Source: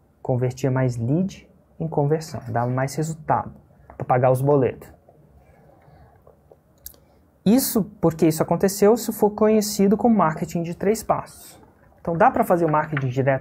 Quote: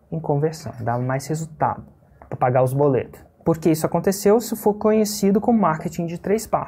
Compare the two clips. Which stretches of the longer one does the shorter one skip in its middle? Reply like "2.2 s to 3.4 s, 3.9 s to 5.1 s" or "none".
5.0 s to 7.9 s